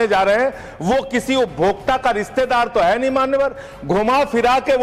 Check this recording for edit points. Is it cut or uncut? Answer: uncut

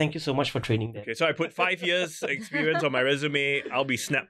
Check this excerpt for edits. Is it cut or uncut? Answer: uncut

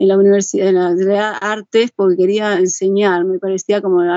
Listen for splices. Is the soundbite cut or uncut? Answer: uncut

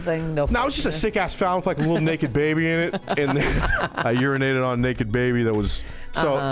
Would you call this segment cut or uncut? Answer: uncut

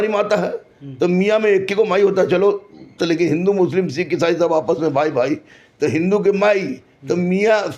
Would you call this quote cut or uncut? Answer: uncut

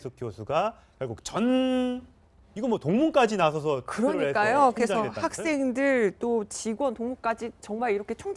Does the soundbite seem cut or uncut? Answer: uncut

